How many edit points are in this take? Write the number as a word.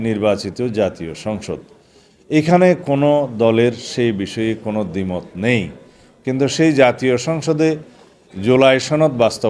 zero